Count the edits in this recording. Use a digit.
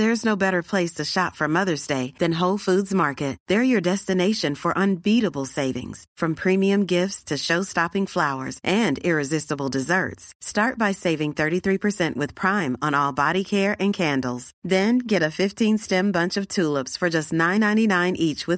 0